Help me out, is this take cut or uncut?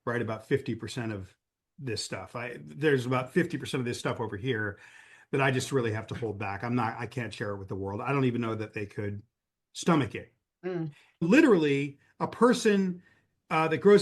cut